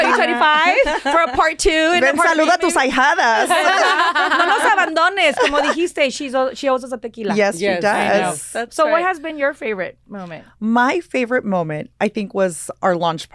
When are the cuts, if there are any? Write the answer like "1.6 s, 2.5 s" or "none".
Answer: none